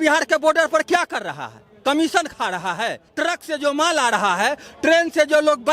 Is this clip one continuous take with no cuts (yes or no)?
no